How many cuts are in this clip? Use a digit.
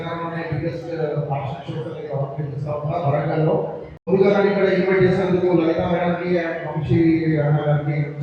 1